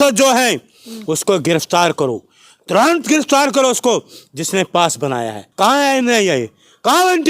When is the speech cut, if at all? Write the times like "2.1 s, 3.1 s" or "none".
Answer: 5.4 s